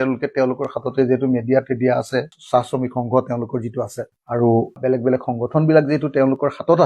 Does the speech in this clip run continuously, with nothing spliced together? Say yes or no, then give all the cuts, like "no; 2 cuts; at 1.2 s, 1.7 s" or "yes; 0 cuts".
no; 1 cut; at 4.1 s